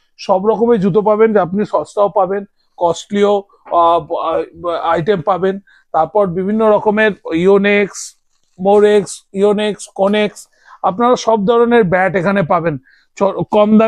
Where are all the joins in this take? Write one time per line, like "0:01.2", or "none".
none